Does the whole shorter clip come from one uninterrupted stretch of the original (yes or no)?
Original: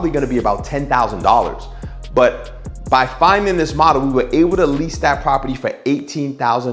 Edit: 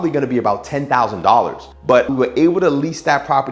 no